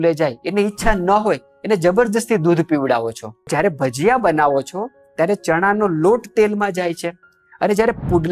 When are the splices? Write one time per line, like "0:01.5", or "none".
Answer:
0:03.4